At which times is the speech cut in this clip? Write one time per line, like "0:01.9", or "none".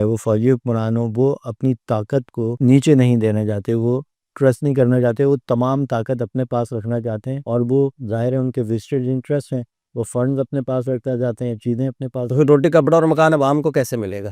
0:02.5